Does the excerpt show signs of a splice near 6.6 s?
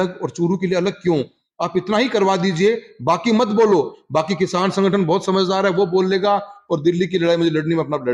no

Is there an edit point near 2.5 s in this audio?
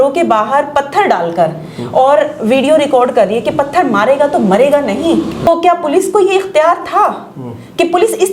no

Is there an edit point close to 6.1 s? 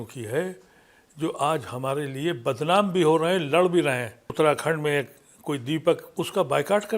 yes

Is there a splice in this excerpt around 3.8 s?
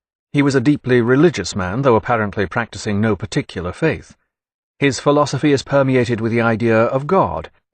yes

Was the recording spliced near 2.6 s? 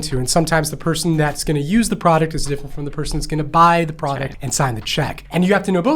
no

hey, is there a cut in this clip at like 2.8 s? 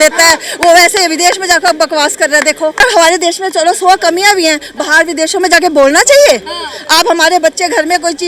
yes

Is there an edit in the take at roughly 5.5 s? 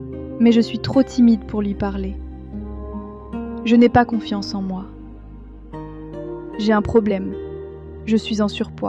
yes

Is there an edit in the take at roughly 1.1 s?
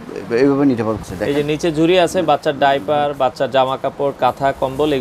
yes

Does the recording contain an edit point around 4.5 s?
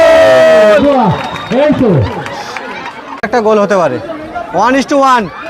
no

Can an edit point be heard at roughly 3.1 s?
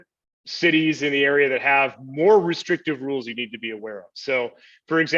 no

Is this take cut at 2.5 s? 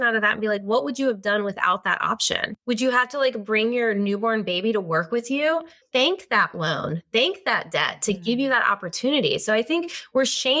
yes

